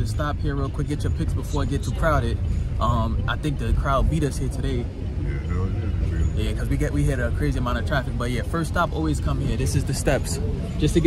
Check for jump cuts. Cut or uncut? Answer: uncut